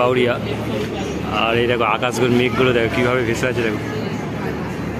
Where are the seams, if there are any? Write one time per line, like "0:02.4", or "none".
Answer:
none